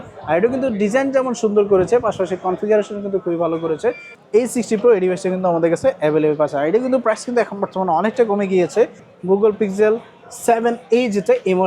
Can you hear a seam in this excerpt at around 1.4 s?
no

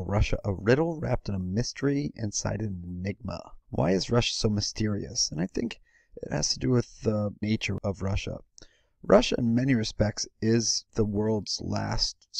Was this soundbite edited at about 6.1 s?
yes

